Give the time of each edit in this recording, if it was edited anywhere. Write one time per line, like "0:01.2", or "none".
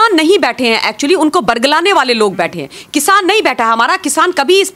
none